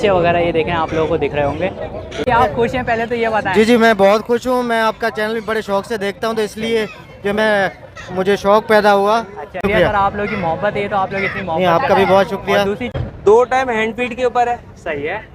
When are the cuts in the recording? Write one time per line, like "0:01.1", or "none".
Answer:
0:02.3
0:09.6
0:12.9